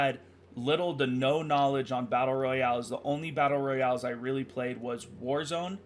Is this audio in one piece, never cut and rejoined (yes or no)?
yes